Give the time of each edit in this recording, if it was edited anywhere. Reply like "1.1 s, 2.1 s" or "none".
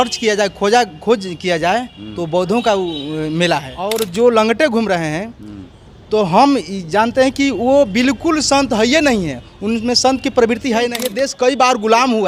4.0 s, 11.0 s